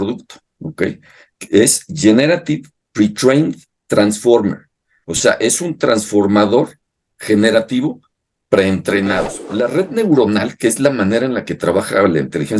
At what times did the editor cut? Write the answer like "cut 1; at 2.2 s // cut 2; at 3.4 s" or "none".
cut 1; at 9.4 s